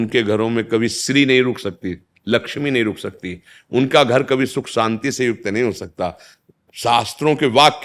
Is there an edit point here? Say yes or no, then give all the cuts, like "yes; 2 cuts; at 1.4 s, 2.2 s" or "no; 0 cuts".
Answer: yes; 1 cut; at 6.3 s